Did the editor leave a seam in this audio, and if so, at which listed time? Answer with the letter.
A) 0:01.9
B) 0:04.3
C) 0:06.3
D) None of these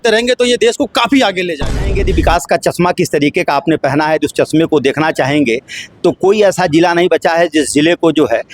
A